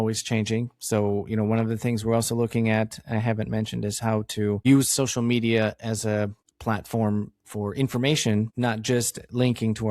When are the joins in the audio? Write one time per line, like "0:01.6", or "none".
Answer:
0:04.6
0:06.5
0:08.5